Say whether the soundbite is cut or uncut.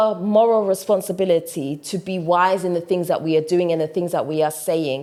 uncut